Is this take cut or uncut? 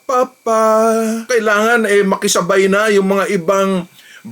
cut